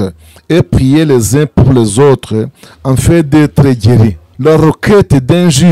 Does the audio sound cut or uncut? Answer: cut